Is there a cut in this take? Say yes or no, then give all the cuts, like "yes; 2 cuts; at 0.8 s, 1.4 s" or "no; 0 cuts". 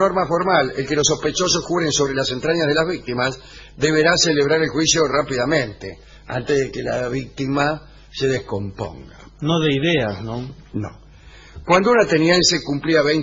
yes; 1 cut; at 10.3 s